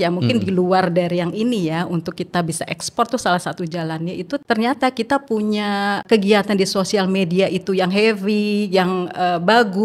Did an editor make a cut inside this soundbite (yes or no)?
yes